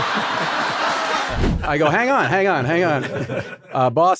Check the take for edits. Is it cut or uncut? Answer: cut